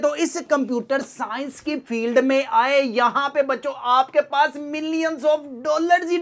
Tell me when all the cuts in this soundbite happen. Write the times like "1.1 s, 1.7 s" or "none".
none